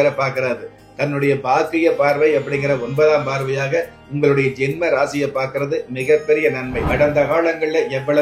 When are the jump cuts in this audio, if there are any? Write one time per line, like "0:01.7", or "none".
0:06.8